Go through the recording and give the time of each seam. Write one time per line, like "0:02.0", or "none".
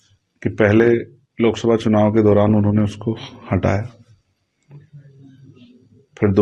none